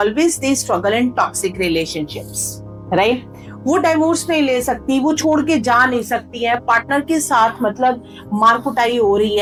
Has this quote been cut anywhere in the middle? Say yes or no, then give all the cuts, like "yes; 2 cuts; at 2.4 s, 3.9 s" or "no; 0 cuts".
no; 0 cuts